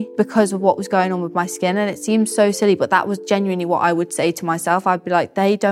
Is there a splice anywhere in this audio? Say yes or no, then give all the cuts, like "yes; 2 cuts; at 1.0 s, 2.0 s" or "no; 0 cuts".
no; 0 cuts